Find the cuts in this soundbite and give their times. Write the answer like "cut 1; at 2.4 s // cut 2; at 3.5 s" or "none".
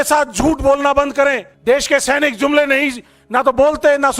cut 1; at 1.5 s